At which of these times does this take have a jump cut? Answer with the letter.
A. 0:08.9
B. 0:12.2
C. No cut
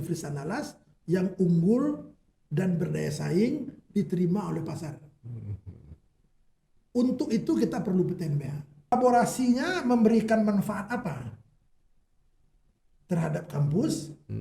A